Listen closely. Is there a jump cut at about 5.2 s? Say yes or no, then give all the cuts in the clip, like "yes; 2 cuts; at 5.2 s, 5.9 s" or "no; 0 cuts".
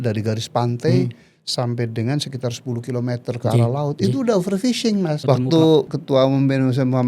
yes; 1 cut; at 5.2 s